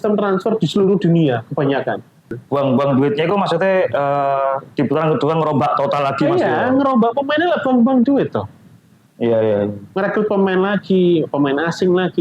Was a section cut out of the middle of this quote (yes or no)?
yes